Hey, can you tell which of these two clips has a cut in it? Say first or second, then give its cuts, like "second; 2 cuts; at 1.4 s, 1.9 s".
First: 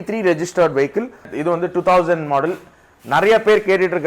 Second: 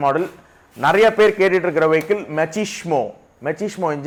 first; 1 cut; at 1.3 s